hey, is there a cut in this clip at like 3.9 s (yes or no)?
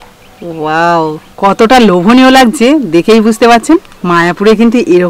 yes